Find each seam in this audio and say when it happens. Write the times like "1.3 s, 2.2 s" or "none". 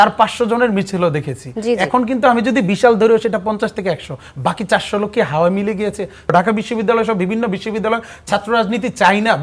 6.3 s